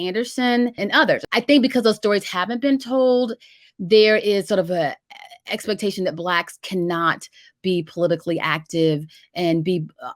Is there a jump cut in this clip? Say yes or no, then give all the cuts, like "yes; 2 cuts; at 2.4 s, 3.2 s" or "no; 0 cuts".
yes; 1 cut; at 1.0 s